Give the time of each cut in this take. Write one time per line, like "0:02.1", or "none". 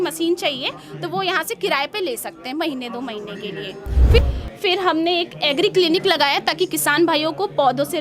0:04.2